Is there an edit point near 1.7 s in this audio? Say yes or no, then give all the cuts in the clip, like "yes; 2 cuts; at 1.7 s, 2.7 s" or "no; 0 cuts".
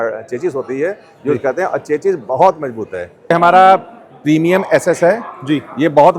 no; 1 cut; at 3.3 s